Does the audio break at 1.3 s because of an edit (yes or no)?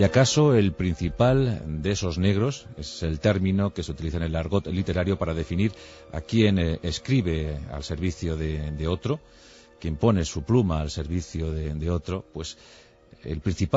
yes